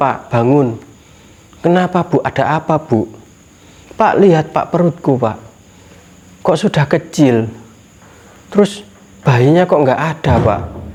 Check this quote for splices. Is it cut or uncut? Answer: uncut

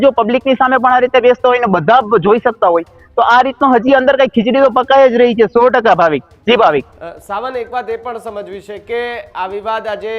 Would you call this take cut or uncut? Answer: uncut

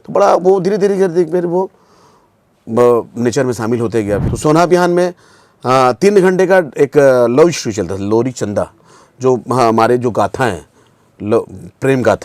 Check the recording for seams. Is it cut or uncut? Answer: cut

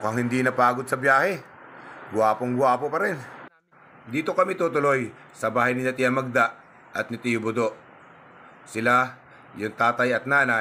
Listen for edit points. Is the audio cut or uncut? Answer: uncut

